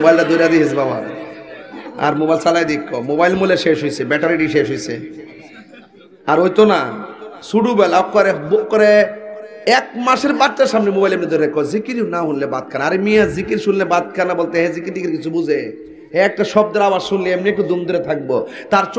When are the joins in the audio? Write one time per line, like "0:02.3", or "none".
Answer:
none